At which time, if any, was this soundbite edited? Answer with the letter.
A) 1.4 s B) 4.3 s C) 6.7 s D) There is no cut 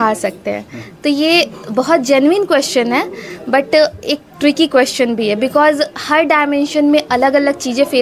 D